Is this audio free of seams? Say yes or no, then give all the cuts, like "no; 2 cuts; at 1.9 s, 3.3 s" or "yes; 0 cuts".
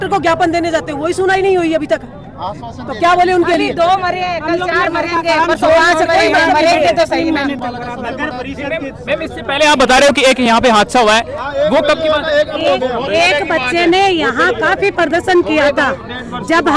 yes; 0 cuts